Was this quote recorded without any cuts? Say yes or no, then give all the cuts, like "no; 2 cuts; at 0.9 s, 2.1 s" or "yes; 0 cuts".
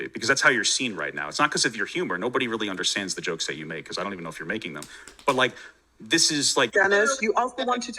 no; 1 cut; at 6.7 s